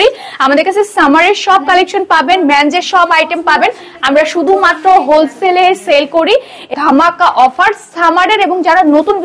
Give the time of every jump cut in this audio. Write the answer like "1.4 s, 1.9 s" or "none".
6.7 s